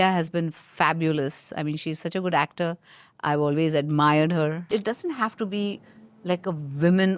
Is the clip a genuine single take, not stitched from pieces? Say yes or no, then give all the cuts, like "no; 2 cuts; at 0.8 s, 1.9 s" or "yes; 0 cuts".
no; 1 cut; at 4.7 s